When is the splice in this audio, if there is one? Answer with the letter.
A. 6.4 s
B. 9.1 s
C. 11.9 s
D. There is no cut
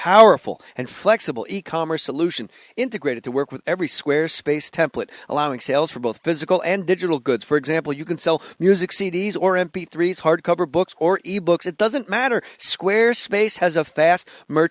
B